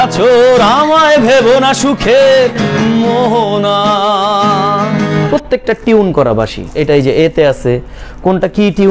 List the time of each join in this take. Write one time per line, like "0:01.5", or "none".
0:05.3
0:06.7